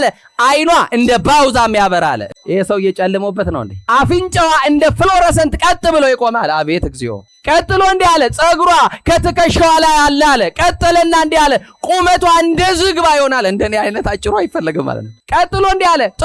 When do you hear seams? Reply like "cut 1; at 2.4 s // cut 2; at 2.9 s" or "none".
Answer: cut 1; at 2.3 s // cut 2; at 3.7 s